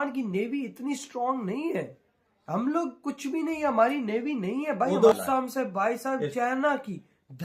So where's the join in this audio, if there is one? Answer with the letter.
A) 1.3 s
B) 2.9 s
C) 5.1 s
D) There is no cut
C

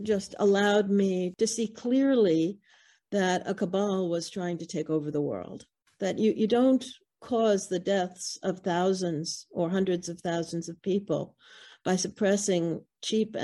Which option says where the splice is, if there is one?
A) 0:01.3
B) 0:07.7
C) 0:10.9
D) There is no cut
A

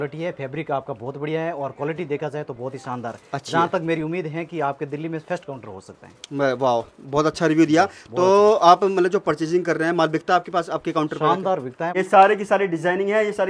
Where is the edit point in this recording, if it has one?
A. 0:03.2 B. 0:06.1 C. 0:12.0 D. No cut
C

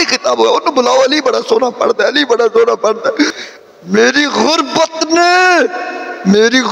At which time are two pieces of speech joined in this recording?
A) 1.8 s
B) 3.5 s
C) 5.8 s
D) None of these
B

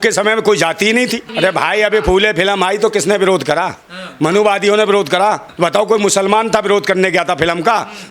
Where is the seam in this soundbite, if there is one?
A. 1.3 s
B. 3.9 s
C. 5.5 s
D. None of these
A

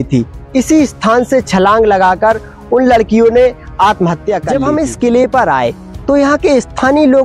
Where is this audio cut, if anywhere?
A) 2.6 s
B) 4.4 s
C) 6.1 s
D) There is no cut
B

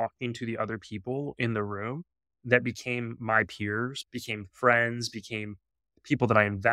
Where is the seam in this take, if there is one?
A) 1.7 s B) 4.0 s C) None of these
B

